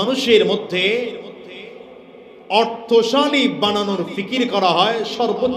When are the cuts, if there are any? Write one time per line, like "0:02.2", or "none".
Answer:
none